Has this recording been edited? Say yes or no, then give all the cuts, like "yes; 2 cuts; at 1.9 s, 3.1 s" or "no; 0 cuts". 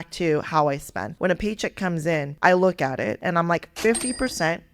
yes; 3 cuts; at 1.0 s, 2.3 s, 3.2 s